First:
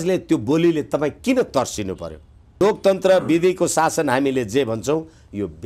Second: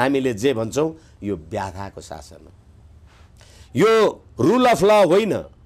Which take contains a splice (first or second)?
first